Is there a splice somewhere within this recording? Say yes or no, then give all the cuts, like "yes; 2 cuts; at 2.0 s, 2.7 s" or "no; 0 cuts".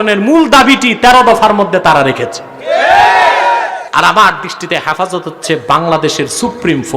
yes; 1 cut; at 3.8 s